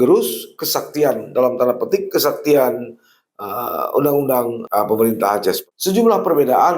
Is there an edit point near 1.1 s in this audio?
no; 2 cuts; at 4.6 s, 5.6 s

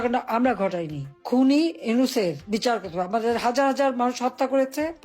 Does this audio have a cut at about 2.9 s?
no; 1 cut; at 1.1 s

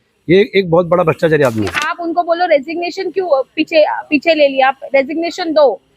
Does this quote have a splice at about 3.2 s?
no; 1 cut; at 1.9 s

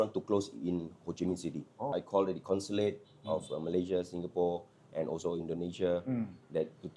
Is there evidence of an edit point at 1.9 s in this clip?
no; 0 cuts

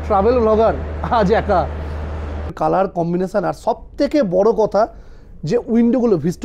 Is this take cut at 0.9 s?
no; 1 cut; at 2.5 s

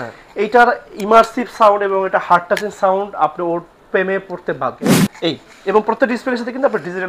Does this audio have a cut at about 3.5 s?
no; 1 cut; at 4.8 s

